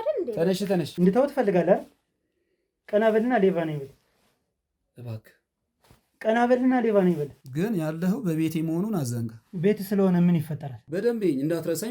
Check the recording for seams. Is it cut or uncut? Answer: cut